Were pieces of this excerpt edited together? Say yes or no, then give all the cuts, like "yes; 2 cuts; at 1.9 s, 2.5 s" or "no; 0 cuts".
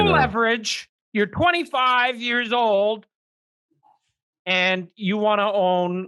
no; 0 cuts